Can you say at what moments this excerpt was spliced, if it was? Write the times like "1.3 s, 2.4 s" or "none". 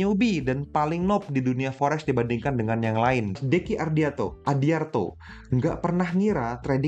3.4 s